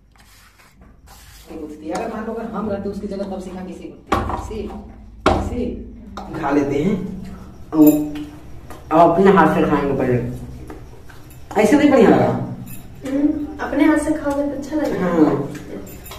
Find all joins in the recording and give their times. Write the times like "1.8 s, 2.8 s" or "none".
1.5 s, 6.4 s